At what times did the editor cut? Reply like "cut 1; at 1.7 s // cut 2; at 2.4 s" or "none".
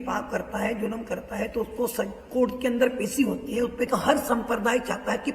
cut 1; at 3.9 s